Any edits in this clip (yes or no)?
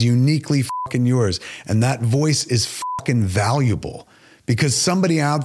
no